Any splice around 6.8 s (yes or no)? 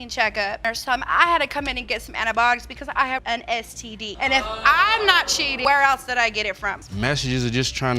yes